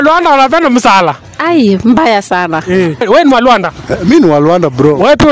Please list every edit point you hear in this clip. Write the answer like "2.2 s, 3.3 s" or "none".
3.0 s